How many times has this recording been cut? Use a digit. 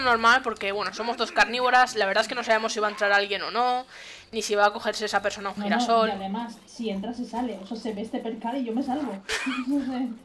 1